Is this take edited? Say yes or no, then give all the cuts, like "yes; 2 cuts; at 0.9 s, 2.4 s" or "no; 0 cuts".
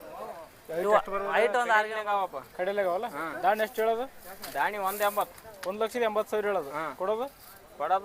yes; 1 cut; at 1.9 s